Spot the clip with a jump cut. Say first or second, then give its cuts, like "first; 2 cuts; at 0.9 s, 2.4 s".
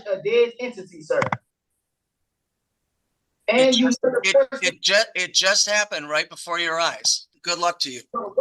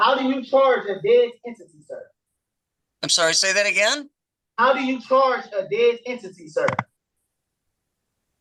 first; 1 cut; at 7.3 s